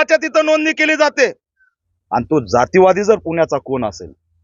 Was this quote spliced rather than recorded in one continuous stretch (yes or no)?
yes